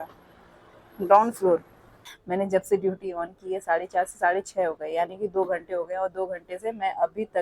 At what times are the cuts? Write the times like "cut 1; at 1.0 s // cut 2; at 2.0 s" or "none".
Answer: cut 1; at 2.1 s

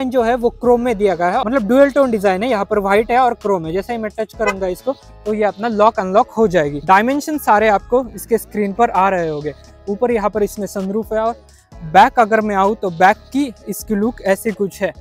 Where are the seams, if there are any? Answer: none

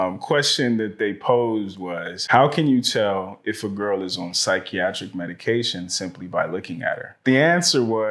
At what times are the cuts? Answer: cut 1; at 2.2 s // cut 2; at 7.2 s

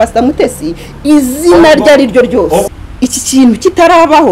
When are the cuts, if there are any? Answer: cut 1; at 2.7 s

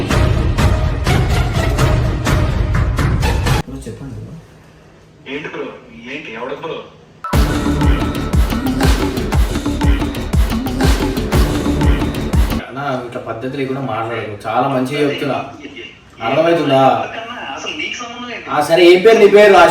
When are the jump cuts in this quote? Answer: cut 1; at 3.7 s // cut 2; at 12.7 s

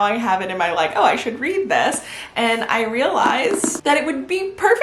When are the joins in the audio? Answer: cut 1; at 3.8 s

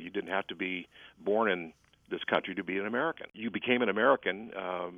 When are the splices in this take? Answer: cut 1; at 3.4 s

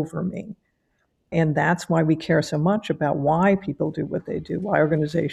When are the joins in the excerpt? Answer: cut 1; at 1.3 s

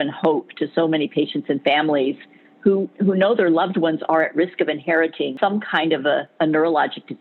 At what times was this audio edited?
cut 1; at 5.3 s // cut 2; at 6.3 s

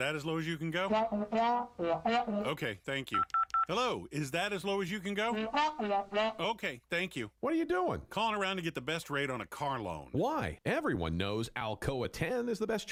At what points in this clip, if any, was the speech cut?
none

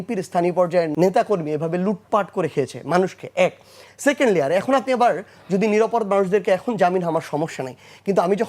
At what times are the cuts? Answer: cut 1; at 0.9 s

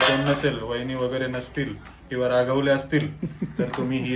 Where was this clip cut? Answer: none

